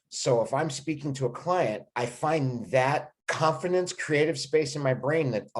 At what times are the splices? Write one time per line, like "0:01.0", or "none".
0:01.9
0:03.2